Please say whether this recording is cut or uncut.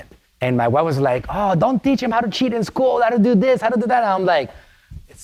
uncut